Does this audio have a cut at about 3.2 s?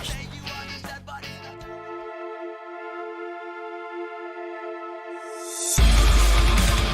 no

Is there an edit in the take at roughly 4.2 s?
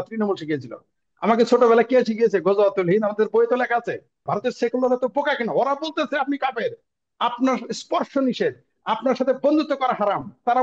yes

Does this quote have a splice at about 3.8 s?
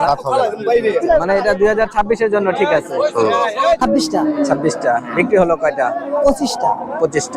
yes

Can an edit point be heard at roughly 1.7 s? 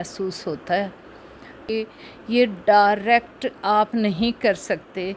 yes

